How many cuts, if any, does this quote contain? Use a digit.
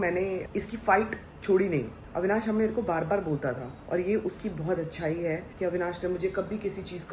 0